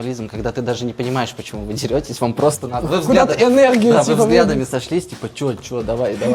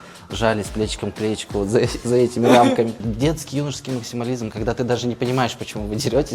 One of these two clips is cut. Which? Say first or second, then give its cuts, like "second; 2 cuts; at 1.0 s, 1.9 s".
second; 1 cut; at 3.0 s